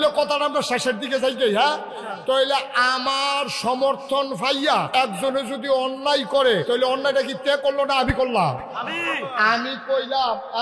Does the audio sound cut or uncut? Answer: cut